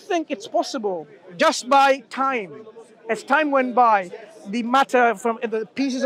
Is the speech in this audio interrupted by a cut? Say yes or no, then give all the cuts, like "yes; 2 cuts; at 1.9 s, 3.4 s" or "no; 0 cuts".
no; 0 cuts